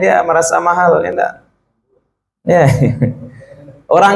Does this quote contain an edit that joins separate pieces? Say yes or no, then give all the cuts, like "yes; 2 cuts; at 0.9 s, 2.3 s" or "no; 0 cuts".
no; 0 cuts